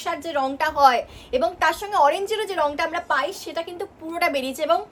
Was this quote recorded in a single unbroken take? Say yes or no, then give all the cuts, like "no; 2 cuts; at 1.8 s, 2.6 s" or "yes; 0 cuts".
yes; 0 cuts